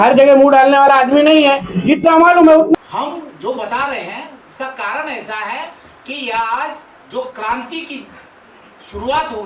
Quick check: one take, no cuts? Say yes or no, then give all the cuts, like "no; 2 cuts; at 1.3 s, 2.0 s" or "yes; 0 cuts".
no; 1 cut; at 2.8 s